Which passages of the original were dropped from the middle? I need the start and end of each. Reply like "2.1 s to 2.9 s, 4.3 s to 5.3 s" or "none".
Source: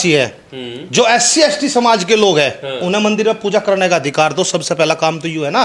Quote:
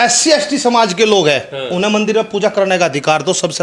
none